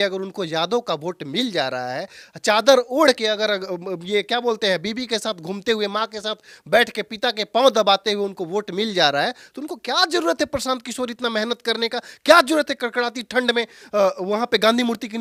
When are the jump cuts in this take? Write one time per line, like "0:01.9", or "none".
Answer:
none